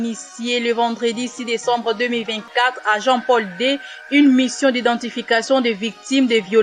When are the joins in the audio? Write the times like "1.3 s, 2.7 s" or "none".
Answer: none